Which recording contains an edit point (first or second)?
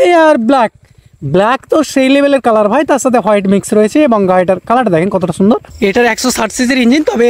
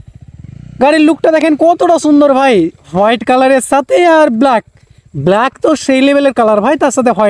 first